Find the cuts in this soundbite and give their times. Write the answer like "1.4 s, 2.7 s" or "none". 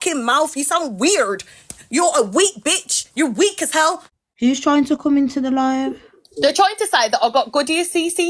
4.1 s